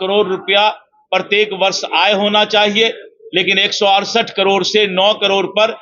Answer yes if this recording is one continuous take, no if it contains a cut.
yes